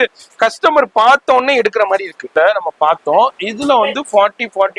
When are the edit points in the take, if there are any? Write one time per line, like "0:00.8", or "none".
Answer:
0:02.2